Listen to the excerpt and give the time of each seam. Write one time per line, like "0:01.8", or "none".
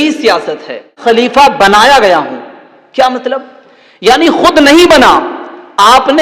0:01.0